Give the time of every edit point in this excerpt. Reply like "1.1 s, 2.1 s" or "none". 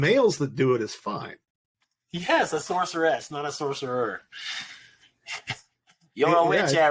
none